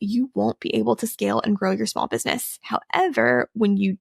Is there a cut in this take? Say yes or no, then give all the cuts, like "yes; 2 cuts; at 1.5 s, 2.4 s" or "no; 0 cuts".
yes; 1 cut; at 2.5 s